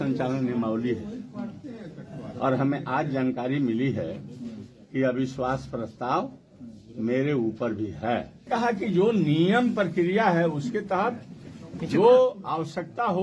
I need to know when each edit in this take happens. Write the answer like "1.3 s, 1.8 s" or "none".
8.3 s